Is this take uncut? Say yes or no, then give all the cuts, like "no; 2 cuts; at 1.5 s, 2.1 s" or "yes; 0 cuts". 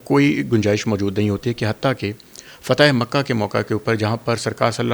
yes; 0 cuts